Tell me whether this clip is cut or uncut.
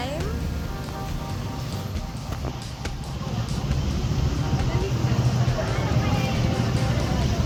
uncut